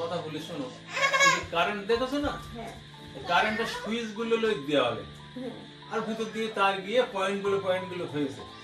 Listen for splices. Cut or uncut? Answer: uncut